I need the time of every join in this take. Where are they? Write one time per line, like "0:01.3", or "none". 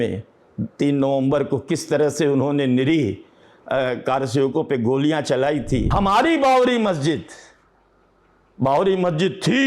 0:05.9